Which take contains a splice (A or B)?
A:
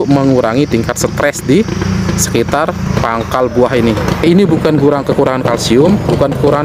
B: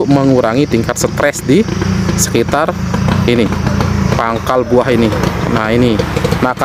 A